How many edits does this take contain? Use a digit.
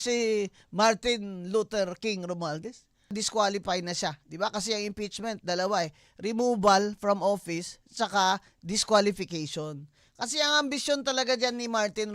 1